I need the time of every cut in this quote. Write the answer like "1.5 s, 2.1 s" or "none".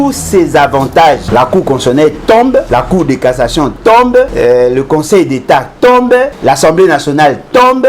1.2 s, 2.7 s, 4.3 s, 6.4 s